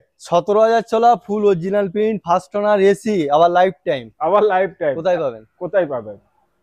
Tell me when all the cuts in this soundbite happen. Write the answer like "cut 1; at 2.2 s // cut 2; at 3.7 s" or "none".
none